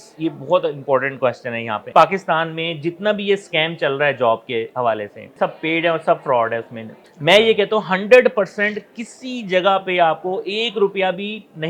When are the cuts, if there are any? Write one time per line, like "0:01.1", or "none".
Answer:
0:01.9
0:05.3
0:07.0